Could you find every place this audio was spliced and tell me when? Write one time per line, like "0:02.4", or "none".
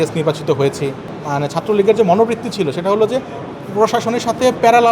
0:01.1